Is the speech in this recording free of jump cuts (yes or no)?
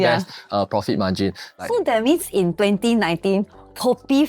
no